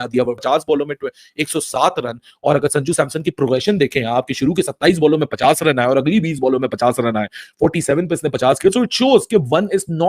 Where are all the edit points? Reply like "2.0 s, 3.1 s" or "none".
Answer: none